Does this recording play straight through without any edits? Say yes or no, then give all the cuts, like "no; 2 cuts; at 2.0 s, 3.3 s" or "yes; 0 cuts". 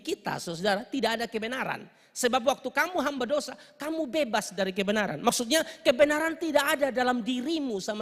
yes; 0 cuts